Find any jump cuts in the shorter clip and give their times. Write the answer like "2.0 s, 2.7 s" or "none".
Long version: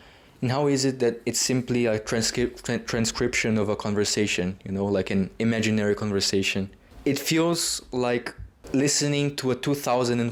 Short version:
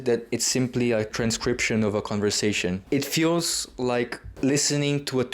1.1 s, 2.8 s, 4.2 s